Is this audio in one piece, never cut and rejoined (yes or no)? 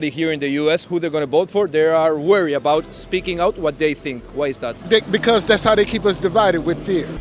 yes